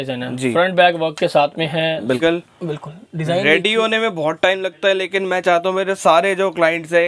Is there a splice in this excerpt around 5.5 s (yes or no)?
no